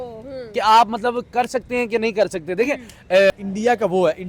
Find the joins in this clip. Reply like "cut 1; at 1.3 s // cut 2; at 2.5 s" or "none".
cut 1; at 3.3 s